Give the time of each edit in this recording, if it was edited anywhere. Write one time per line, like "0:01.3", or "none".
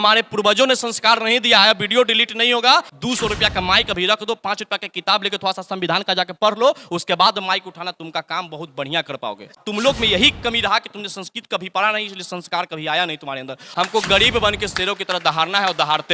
0:02.9
0:09.6
0:13.6